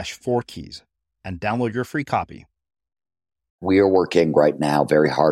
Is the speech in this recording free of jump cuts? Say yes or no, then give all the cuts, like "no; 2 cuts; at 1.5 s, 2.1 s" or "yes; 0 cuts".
no; 1 cut; at 3.6 s